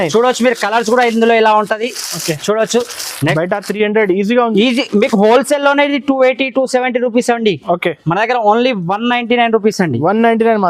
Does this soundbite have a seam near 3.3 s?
yes; 1 cut; at 3.3 s

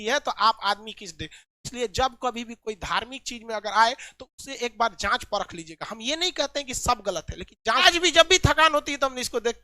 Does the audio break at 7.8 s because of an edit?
yes; 1 cut; at 7.8 s

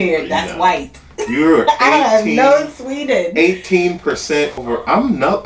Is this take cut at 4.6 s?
yes; 1 cut; at 4.6 s

